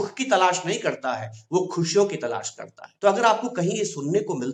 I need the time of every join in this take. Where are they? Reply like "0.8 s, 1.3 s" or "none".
none